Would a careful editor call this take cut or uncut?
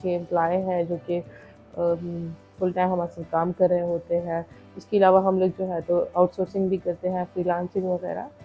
uncut